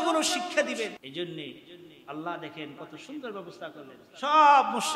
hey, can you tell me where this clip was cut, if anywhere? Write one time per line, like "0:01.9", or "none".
0:01.0